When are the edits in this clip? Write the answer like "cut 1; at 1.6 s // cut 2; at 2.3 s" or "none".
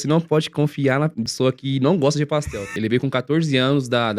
cut 1; at 1.3 s // cut 2; at 2.7 s